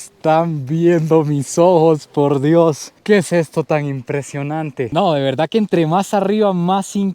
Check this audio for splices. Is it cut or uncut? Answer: cut